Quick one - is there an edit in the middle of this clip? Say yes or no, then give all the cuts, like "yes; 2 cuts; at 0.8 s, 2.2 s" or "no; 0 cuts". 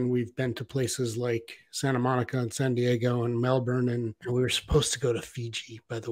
yes; 1 cut; at 4.2 s